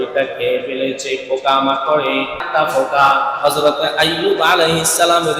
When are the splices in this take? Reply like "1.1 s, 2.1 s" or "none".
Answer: 2.4 s